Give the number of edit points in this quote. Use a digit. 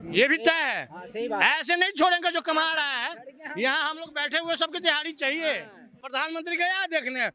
1